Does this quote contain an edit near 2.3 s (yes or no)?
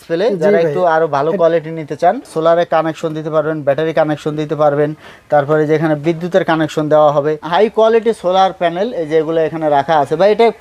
yes